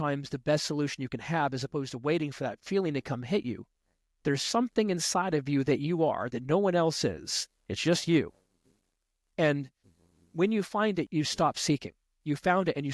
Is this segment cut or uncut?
cut